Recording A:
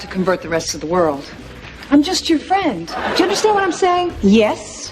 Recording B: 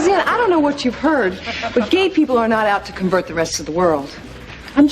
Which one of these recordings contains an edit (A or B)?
A